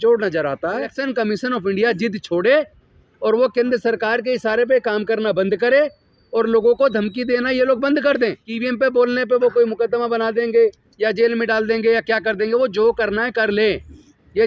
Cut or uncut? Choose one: cut